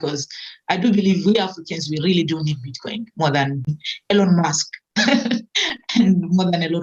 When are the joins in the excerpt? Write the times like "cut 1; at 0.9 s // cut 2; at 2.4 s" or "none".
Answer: cut 1; at 3.8 s

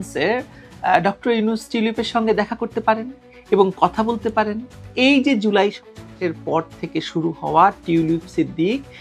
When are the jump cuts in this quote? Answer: none

